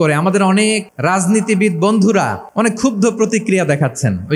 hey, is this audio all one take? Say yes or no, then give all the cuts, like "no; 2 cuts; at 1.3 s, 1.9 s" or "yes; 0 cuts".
no; 2 cuts; at 0.9 s, 2.4 s